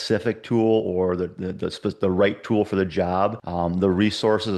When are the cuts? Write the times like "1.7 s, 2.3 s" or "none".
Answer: 3.4 s